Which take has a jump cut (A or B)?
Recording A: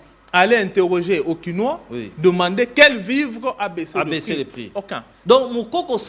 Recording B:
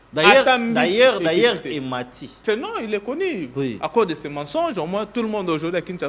B